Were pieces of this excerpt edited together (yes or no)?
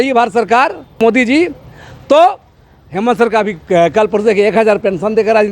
yes